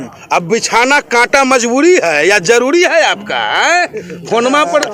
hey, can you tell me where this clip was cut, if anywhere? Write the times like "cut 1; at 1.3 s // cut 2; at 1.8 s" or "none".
none